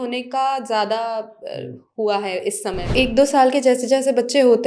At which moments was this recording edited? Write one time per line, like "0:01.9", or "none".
0:02.7